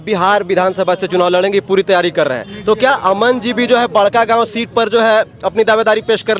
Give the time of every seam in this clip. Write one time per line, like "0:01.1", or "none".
none